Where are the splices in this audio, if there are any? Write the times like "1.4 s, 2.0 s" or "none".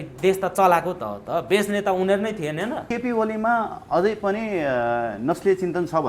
2.8 s